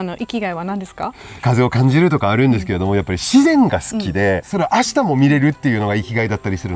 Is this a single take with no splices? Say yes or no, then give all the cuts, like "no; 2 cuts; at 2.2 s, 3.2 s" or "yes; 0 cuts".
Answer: no; 2 cuts; at 1.4 s, 4.5 s